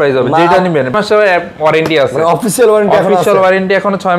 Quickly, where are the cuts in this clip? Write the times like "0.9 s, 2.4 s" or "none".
0.9 s